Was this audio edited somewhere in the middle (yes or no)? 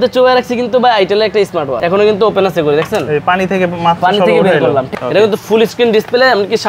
yes